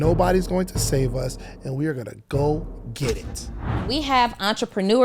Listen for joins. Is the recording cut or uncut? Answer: cut